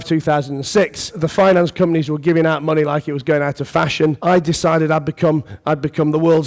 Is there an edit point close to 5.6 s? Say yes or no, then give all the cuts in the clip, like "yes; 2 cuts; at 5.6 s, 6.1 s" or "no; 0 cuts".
no; 2 cuts; at 1.2 s, 4.2 s